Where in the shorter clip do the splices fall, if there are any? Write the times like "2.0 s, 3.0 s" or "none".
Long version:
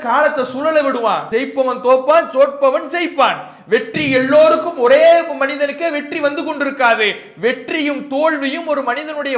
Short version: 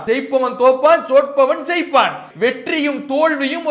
2.2 s